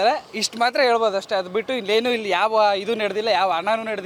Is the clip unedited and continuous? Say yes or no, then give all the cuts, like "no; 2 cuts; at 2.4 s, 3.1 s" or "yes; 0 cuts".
yes; 0 cuts